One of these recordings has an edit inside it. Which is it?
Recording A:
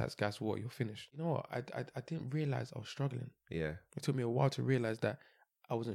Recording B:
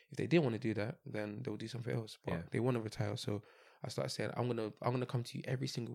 A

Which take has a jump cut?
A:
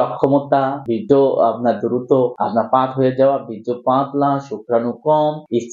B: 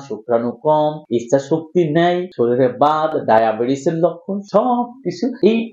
A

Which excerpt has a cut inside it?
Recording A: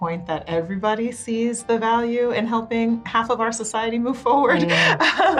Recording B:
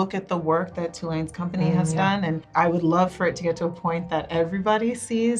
B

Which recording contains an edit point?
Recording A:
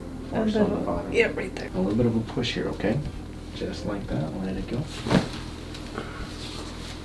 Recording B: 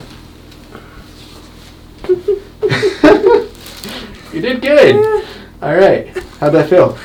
A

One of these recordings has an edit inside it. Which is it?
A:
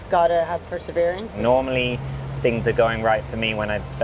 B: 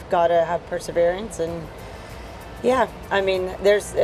A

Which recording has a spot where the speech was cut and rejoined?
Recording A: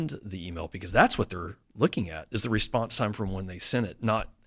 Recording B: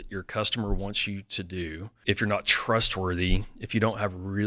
B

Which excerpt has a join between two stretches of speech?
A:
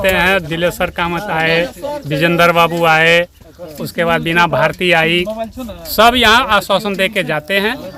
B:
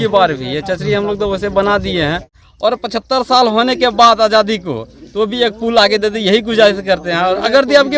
B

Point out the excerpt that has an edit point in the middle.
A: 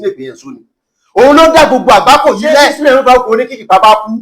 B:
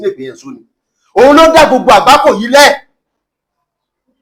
A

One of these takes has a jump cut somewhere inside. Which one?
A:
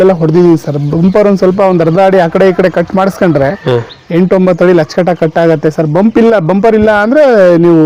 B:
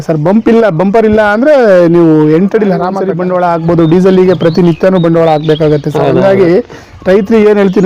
B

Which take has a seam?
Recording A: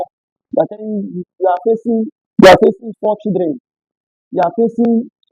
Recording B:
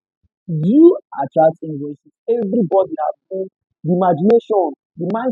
B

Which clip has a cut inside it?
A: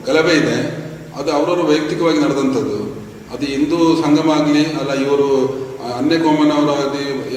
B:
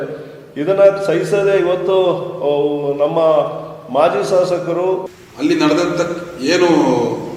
B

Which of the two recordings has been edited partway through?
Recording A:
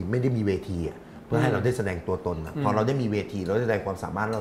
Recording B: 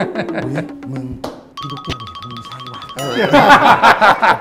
B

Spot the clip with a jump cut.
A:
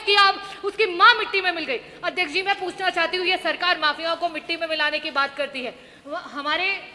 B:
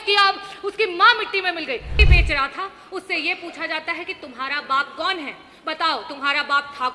B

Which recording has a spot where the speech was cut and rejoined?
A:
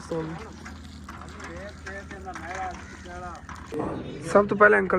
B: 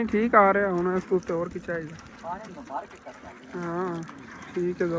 A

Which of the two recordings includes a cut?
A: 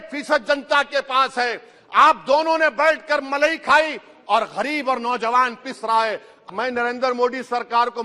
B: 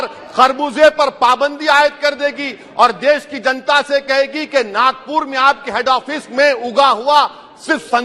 A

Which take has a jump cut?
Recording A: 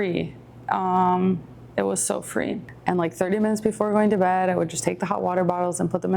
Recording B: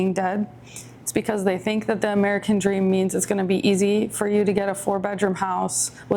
A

